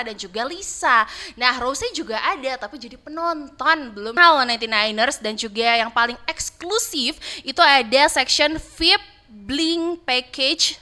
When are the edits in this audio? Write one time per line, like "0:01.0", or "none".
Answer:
0:04.2

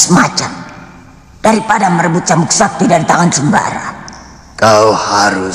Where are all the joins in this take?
none

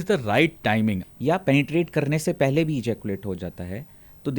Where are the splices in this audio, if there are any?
0:01.1

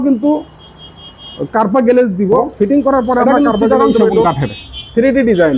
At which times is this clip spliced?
0:04.2

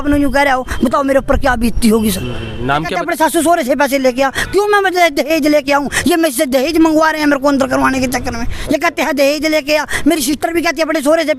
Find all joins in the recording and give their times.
0:02.9

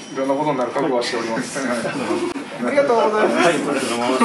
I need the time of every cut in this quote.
none

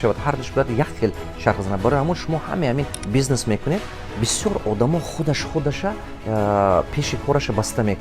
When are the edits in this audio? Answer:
0:03.0

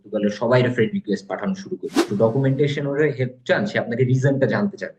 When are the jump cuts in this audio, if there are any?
0:02.1

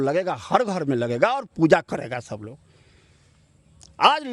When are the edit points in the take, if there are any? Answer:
none

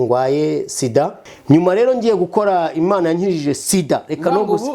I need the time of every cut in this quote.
0:01.3

